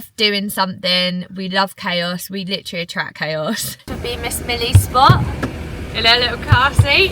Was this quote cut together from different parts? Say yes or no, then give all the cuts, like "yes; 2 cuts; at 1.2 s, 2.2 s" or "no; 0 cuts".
yes; 1 cut; at 3.9 s